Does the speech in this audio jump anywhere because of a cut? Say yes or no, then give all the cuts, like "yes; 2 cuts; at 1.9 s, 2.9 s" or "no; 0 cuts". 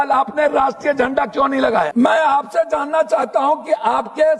yes; 1 cut; at 1.9 s